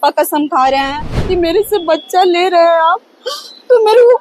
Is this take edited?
yes; 1 cut; at 1.2 s

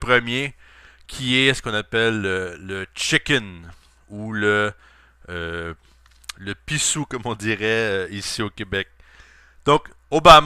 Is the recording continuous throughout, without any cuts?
no; 1 cut; at 5.5 s

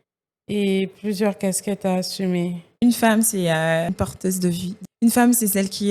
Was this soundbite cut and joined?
yes; 2 cuts; at 2.8 s, 4.5 s

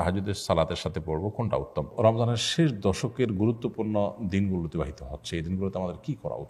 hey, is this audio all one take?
no; 1 cut; at 1.9 s

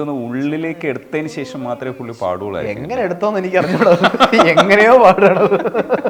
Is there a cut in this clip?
no; 0 cuts

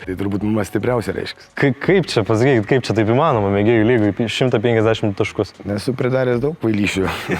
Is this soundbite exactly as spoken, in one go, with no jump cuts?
no; 1 cut; at 1.5 s

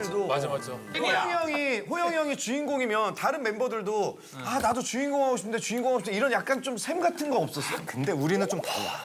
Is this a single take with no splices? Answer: no; 1 cut; at 1.0 s

